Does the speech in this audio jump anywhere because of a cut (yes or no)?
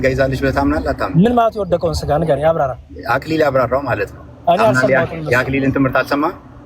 no